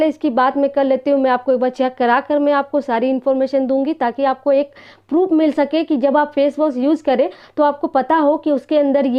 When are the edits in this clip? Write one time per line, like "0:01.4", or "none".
none